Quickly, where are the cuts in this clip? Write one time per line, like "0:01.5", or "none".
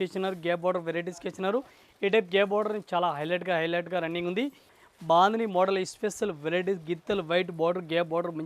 0:04.7